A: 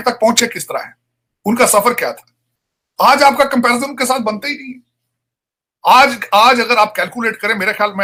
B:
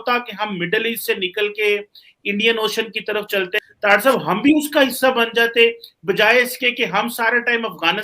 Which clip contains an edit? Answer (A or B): B